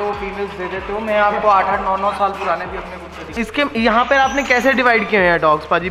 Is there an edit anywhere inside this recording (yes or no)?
yes